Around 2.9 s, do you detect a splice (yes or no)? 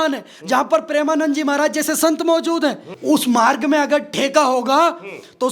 yes